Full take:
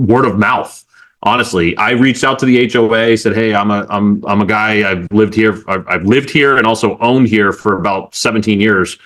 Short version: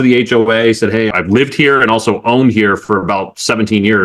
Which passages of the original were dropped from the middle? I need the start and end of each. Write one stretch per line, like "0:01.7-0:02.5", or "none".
0:03.5-0:05.8